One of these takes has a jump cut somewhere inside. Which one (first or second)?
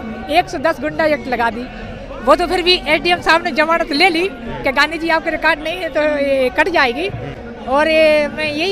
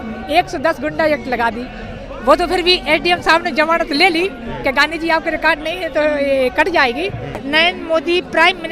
second